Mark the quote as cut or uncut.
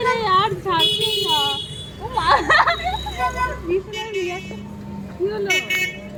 uncut